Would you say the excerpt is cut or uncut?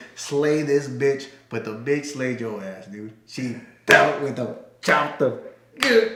uncut